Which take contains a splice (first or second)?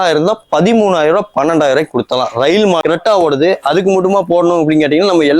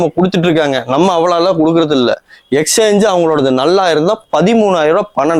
first